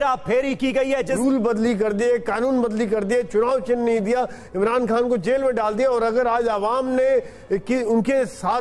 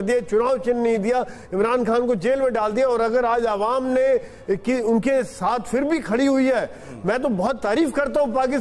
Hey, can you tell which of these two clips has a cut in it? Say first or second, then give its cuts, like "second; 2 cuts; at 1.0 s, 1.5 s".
first; 1 cut; at 1.1 s